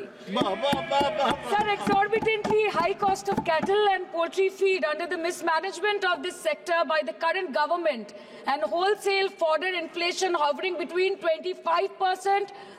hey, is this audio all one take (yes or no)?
yes